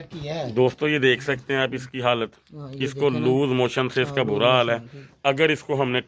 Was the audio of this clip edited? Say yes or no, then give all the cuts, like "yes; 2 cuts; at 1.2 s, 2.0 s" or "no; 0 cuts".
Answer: no; 0 cuts